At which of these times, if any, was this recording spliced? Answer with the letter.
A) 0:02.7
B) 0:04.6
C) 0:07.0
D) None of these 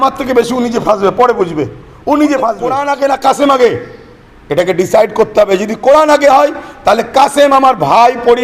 A